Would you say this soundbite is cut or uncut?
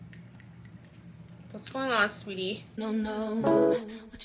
cut